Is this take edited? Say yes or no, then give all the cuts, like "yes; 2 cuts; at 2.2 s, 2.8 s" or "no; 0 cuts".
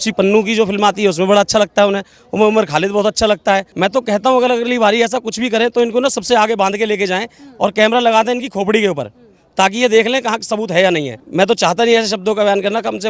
yes; 2 cuts; at 3.7 s, 11.2 s